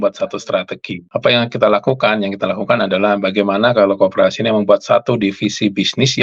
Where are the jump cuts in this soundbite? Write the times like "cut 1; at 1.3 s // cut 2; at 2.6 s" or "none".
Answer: none